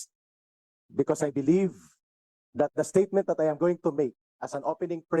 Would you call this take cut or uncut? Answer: uncut